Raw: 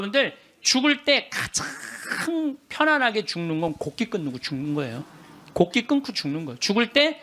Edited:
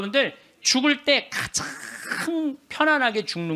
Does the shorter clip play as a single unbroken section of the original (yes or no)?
yes